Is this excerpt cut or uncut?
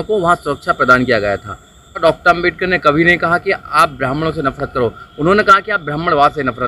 cut